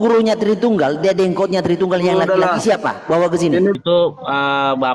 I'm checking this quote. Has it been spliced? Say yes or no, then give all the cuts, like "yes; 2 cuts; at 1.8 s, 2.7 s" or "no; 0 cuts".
yes; 1 cut; at 3.8 s